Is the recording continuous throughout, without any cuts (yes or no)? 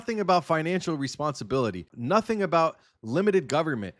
no